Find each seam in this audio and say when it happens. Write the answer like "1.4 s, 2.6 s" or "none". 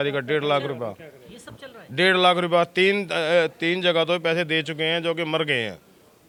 none